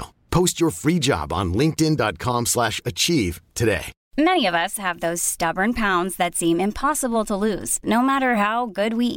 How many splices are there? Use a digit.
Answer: 1